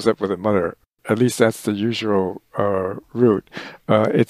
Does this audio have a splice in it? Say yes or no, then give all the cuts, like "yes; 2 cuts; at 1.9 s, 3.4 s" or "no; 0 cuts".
yes; 1 cut; at 1.0 s